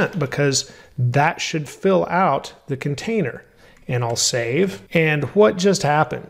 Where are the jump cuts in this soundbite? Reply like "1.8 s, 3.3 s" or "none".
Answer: 4.8 s